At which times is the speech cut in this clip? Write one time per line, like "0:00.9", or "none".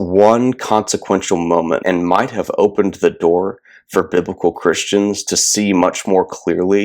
0:01.8